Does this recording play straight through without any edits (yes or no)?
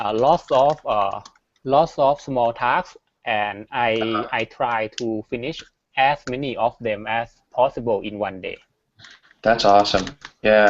no